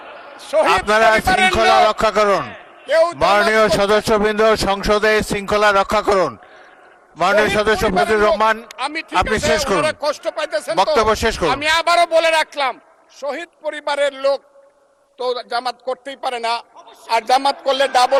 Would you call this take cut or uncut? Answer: uncut